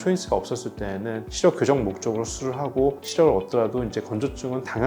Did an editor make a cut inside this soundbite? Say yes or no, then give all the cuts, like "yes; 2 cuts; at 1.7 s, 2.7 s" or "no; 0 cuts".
no; 0 cuts